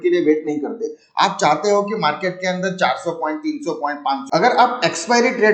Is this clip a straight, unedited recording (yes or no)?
no